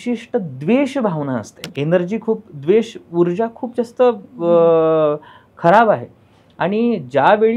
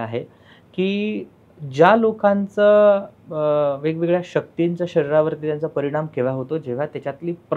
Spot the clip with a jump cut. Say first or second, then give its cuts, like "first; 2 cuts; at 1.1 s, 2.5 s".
first; 1 cut; at 1.6 s